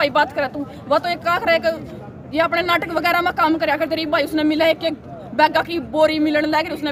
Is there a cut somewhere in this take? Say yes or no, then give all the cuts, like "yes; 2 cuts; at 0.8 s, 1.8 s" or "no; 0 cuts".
no; 0 cuts